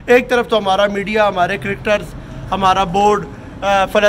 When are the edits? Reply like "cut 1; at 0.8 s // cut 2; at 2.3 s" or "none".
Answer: none